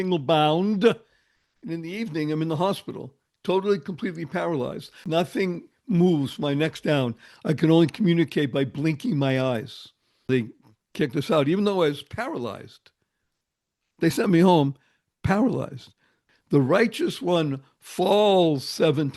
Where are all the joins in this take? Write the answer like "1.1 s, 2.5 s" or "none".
5.0 s, 10.3 s, 16.3 s